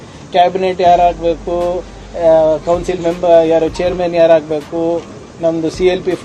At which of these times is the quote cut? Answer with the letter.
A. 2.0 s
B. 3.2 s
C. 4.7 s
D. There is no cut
D